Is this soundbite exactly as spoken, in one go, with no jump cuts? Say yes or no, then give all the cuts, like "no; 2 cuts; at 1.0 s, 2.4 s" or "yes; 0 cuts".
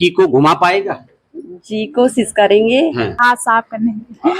no; 1 cut; at 3.1 s